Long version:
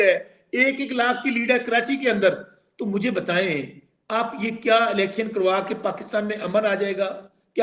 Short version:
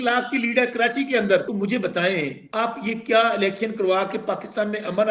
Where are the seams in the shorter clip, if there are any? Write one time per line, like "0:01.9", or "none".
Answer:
0:01.5
0:02.4